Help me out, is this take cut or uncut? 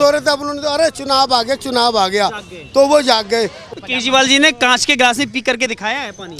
cut